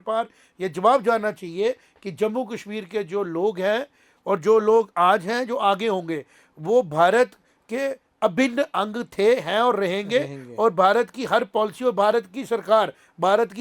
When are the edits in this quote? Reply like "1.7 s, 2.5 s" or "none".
none